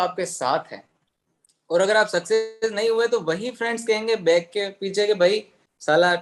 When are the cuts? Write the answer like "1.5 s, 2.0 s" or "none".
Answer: none